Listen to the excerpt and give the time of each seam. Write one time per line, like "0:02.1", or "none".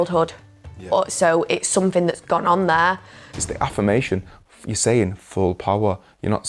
0:03.4